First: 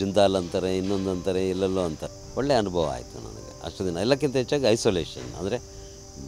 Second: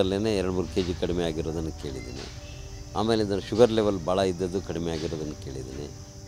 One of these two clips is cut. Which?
first; 1 cut; at 2.1 s

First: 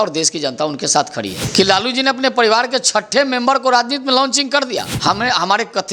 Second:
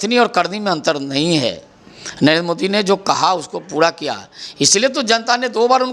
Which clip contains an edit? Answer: first; 2 cuts; at 1.4 s, 4.9 s

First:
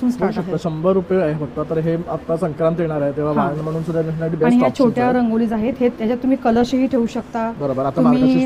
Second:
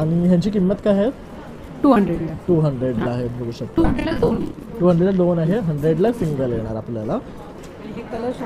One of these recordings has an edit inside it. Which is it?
second; 1 cut; at 7.4 s

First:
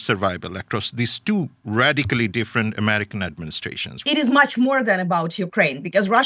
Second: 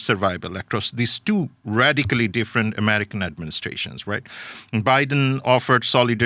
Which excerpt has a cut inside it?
first; 1 cut; at 3.9 s

